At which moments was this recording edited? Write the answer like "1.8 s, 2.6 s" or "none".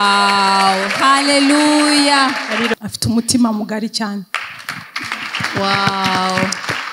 2.7 s